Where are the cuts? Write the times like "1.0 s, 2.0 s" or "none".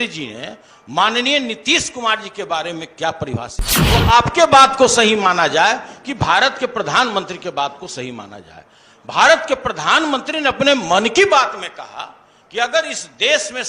3.9 s